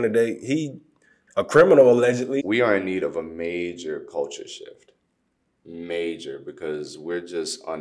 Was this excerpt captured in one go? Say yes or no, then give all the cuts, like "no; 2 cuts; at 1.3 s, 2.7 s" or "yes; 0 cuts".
no; 1 cut; at 2.3 s